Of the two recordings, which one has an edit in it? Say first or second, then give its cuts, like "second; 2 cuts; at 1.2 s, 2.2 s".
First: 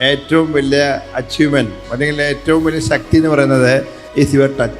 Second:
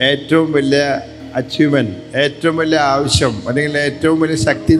first; 2 cuts; at 1.1 s, 1.8 s